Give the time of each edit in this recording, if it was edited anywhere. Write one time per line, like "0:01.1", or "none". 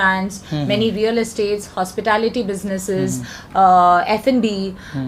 none